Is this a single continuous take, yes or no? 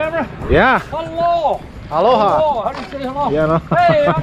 yes